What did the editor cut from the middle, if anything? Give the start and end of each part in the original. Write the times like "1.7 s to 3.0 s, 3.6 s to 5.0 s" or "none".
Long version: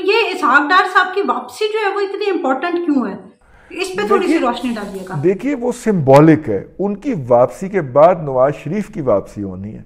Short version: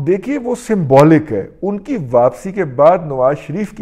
none